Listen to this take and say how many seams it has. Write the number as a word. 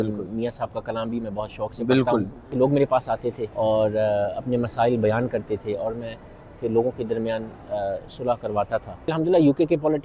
three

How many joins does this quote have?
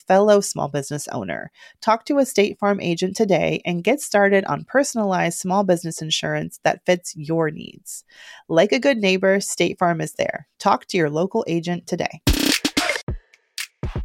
one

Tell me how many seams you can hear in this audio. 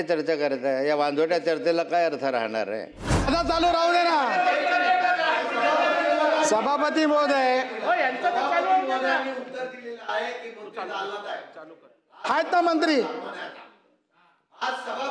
one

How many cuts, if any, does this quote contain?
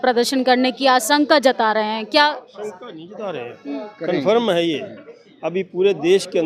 zero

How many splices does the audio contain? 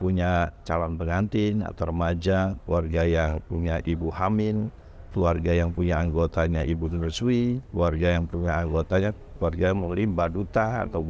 zero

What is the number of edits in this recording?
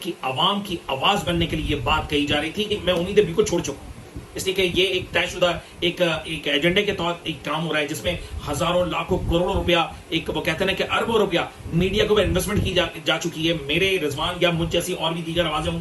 one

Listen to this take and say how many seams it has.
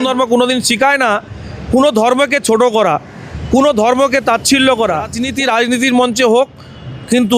one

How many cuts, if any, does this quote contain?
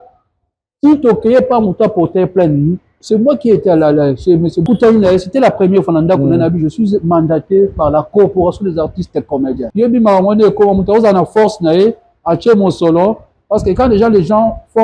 two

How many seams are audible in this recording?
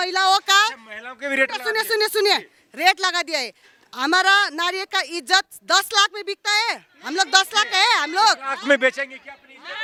zero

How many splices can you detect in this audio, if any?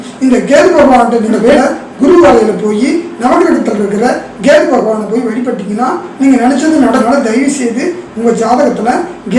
two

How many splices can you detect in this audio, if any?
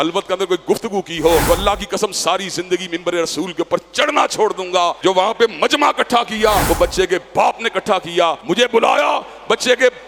four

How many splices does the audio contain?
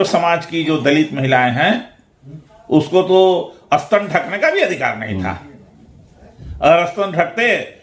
zero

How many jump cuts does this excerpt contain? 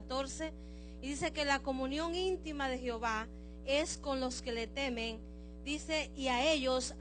one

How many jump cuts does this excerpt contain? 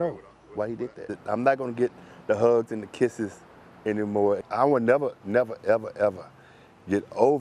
one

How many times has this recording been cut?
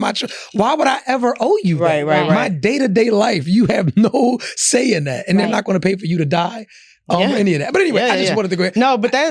zero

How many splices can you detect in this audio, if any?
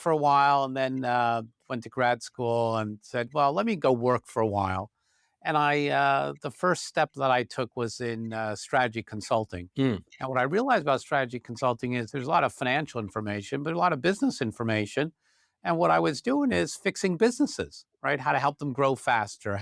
zero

